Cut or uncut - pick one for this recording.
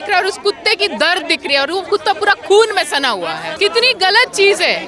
uncut